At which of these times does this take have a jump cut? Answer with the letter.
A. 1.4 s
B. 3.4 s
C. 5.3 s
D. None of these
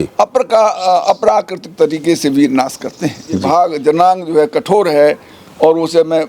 B